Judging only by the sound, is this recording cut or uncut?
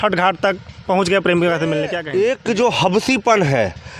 cut